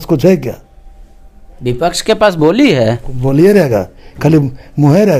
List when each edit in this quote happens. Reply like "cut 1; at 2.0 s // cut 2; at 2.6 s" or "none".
none